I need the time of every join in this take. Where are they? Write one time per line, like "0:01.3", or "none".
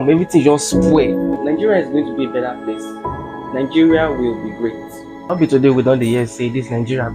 0:01.4
0:05.3